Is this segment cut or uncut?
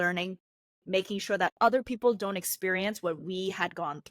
uncut